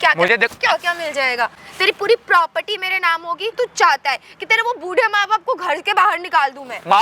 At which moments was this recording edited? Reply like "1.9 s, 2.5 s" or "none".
3.5 s